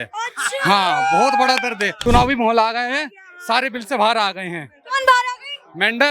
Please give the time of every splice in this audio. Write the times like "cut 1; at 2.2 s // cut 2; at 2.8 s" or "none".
cut 1; at 1.9 s